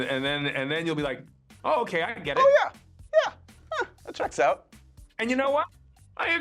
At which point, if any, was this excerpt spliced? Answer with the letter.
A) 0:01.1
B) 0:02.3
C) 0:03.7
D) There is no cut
B